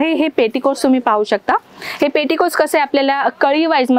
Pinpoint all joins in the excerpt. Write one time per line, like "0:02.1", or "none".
none